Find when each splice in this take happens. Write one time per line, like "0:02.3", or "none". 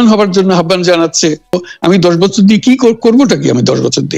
0:01.6